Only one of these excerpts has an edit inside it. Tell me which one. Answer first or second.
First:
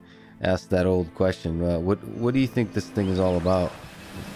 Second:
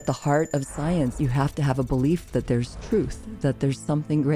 second